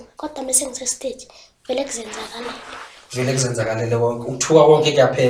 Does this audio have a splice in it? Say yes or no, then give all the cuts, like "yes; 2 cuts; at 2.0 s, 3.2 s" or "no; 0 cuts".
no; 0 cuts